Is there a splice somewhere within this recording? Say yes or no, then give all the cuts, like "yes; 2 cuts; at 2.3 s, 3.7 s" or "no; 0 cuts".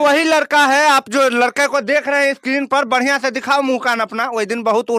no; 0 cuts